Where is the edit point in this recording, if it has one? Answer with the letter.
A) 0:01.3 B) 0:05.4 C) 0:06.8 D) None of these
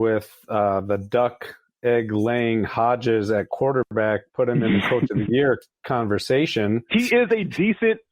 C